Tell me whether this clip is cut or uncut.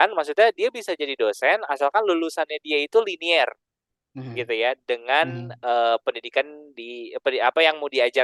uncut